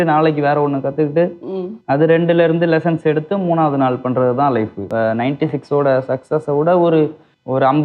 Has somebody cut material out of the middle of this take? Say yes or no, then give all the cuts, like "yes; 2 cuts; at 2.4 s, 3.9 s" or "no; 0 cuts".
yes; 1 cut; at 4.9 s